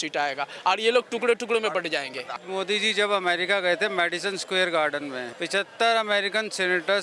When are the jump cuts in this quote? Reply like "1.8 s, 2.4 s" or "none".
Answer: 2.4 s, 5.3 s